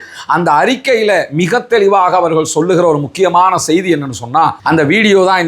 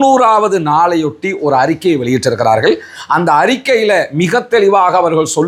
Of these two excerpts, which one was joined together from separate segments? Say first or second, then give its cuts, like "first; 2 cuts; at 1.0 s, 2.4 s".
first; 1 cut; at 4.6 s